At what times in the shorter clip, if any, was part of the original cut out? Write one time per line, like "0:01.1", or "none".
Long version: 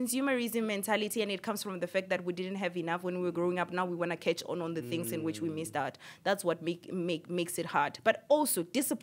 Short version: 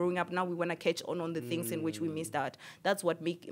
none